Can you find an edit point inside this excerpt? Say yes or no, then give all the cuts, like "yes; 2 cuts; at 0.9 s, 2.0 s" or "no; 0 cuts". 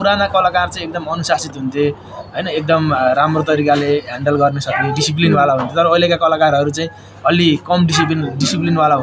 no; 0 cuts